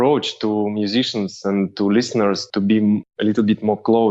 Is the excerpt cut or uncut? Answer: uncut